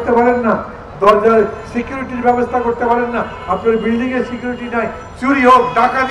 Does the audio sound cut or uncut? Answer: uncut